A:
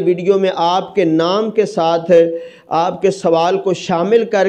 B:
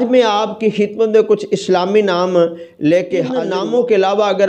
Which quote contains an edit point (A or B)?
B